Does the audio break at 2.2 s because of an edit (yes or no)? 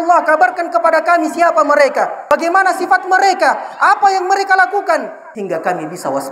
yes